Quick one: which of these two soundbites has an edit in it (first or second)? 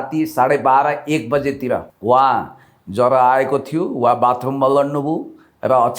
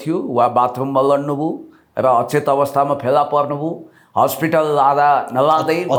first